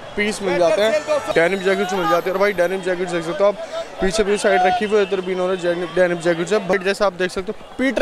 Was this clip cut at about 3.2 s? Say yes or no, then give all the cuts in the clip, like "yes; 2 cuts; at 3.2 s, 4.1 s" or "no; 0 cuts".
no; 2 cuts; at 1.3 s, 6.7 s